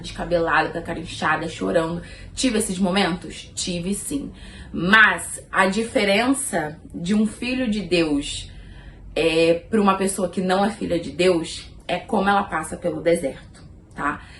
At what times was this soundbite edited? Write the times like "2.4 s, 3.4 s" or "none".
none